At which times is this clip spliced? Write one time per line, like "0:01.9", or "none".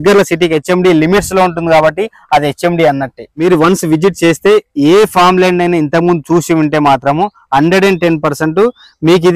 0:03.3